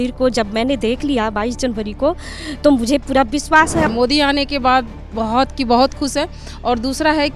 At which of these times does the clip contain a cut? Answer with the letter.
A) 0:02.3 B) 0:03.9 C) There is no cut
B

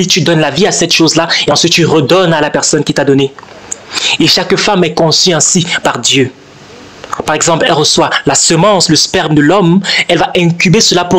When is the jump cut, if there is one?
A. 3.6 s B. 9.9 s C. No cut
C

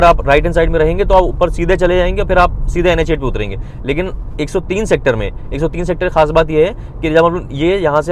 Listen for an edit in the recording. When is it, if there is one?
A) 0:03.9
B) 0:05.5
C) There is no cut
C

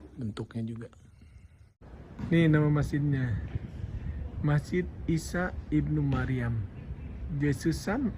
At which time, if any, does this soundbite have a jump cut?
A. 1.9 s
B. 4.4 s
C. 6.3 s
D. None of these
A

